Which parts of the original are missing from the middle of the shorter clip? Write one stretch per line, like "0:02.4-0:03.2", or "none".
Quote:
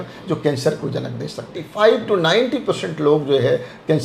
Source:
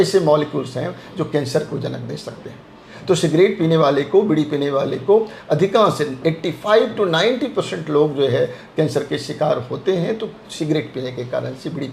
0:02.5-0:06.5